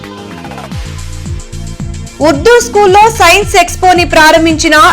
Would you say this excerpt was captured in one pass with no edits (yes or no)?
yes